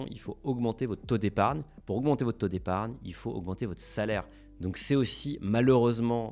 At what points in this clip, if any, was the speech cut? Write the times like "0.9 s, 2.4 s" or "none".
none